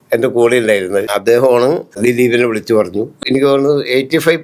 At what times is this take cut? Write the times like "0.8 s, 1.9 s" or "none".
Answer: 1.1 s, 2.0 s, 3.2 s